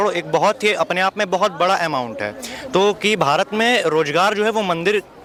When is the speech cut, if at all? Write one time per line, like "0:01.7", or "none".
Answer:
none